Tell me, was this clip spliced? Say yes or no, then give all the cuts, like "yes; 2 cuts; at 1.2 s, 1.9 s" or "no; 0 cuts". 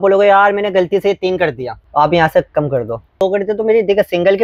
yes; 2 cuts; at 1.8 s, 3.1 s